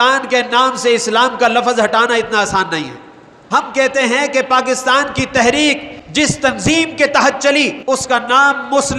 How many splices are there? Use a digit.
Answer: 3